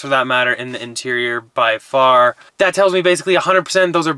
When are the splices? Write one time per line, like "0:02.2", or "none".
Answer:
0:02.4